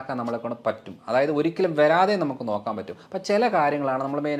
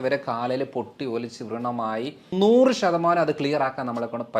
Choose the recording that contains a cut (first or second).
second